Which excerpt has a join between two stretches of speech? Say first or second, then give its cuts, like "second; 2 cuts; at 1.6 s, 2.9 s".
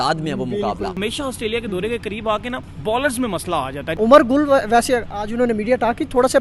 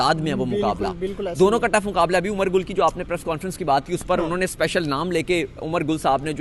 first; 3 cuts; at 0.9 s, 2.6 s, 3.8 s